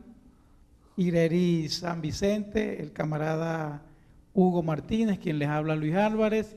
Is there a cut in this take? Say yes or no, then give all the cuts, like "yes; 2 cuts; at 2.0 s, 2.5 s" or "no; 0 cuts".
no; 0 cuts